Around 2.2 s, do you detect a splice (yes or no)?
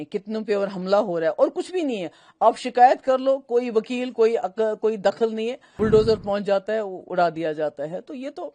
no